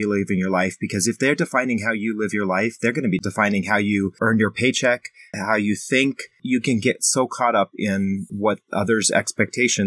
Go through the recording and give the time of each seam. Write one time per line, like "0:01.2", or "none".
0:03.2
0:04.2
0:05.3
0:06.4
0:08.3